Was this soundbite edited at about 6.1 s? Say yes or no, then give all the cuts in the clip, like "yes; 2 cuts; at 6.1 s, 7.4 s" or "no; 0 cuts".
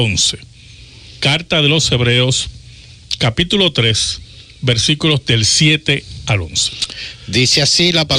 no; 1 cut; at 3.9 s